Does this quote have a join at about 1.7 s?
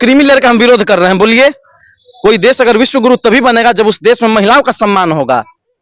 yes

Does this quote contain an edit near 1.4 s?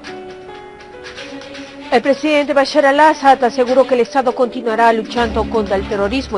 yes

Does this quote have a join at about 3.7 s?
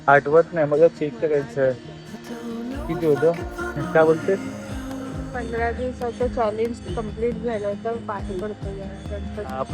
yes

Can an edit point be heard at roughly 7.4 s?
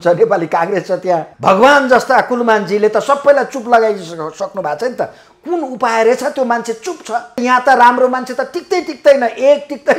yes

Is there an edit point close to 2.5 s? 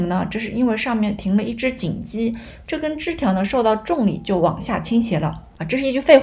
no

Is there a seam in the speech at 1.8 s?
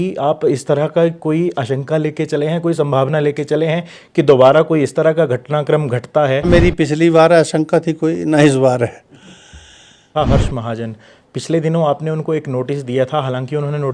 no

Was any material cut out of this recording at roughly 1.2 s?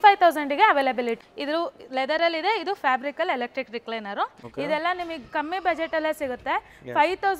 yes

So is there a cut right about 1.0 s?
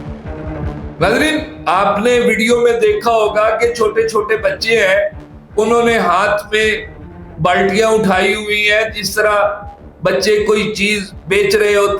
yes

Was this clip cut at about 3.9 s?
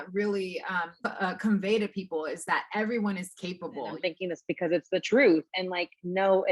yes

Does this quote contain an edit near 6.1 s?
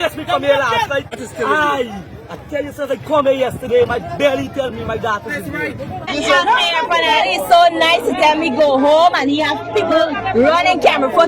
yes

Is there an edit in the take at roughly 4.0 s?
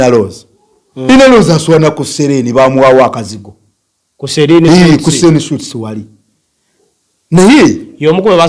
no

